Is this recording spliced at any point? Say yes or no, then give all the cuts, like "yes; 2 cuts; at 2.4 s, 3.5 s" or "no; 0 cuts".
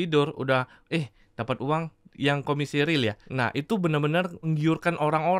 yes; 2 cuts; at 3.2 s, 4.5 s